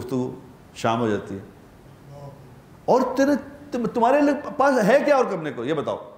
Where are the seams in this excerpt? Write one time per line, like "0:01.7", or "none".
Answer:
none